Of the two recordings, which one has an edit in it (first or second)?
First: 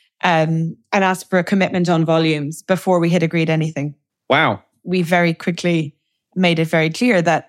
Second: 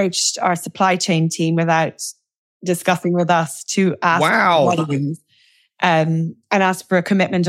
first